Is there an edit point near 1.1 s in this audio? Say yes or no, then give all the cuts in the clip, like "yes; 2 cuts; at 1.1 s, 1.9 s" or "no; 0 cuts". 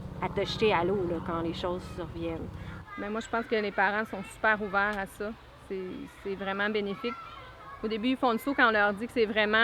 no; 1 cut; at 2.9 s